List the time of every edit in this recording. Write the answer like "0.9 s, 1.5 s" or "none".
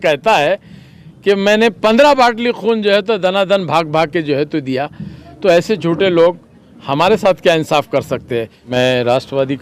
8.6 s